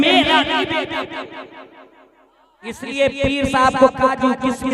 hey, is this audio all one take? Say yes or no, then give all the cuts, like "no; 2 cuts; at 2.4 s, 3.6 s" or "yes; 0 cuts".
no; 1 cut; at 2.6 s